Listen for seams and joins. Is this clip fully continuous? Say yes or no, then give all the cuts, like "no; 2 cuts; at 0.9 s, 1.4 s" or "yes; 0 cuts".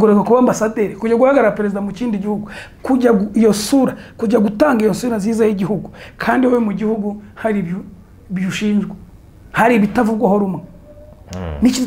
yes; 0 cuts